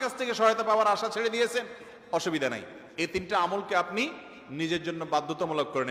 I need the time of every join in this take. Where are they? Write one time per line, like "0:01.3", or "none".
none